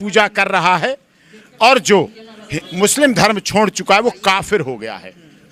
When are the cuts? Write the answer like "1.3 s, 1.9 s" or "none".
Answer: none